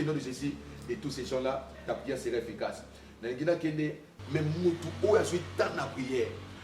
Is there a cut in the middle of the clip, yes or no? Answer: yes